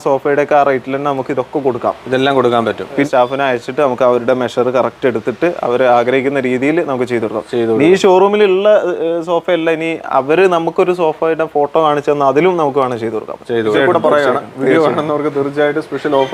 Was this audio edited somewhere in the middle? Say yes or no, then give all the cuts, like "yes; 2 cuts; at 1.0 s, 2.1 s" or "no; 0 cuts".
yes; 2 cuts; at 3.0 s, 13.7 s